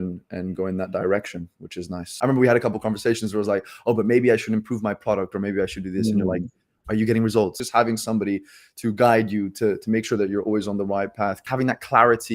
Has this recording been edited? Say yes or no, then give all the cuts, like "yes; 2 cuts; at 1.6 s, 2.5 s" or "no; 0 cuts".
yes; 3 cuts; at 2.0 s, 7.6 s, 11.4 s